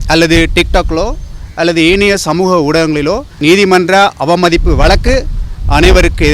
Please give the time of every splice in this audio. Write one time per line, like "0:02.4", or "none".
0:03.3